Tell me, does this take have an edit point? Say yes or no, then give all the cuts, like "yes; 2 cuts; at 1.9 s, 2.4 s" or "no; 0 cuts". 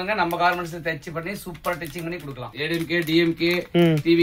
yes; 1 cut; at 2.5 s